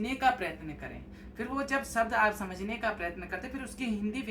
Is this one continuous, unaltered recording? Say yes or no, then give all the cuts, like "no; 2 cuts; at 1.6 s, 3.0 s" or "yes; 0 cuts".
yes; 0 cuts